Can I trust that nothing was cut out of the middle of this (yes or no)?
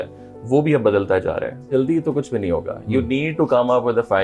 no